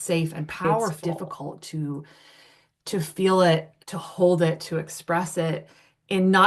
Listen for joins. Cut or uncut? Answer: cut